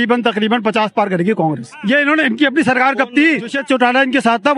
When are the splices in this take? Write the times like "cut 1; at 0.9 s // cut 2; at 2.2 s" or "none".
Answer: cut 1; at 1.7 s // cut 2; at 3.6 s